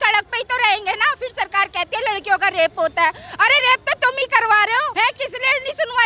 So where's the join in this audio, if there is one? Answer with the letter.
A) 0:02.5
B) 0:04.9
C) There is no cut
B